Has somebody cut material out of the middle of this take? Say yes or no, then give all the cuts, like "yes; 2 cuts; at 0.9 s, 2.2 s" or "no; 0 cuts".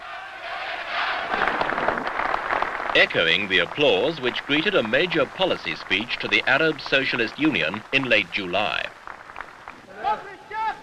no; 0 cuts